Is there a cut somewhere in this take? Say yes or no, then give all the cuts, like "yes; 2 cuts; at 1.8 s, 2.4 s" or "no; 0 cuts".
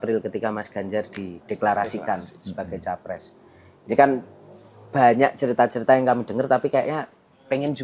no; 0 cuts